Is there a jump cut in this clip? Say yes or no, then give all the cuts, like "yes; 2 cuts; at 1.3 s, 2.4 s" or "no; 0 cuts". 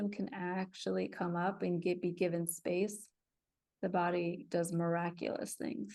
no; 0 cuts